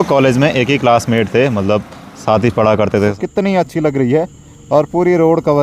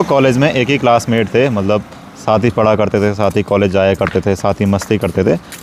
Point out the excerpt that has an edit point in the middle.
first; 1 cut; at 3.2 s

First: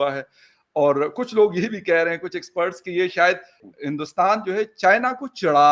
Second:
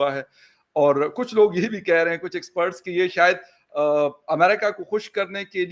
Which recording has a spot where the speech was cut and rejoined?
first; 1 cut; at 3.6 s

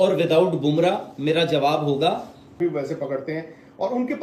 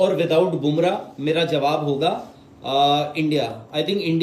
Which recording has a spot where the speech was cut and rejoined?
first; 1 cut; at 2.6 s

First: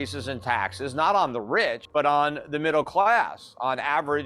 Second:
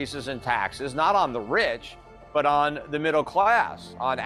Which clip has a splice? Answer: first; 1 cut; at 1.8 s

